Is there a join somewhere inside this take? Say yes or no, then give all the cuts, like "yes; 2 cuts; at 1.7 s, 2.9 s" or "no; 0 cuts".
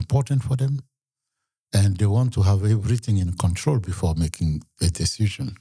no; 0 cuts